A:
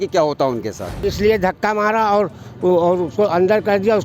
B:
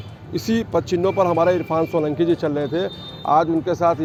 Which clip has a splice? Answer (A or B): A